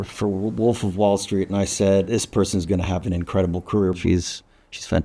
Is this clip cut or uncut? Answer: cut